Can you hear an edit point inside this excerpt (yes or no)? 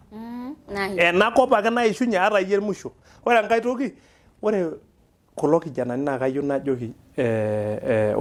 no